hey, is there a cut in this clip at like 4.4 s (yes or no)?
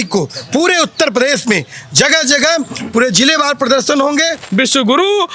yes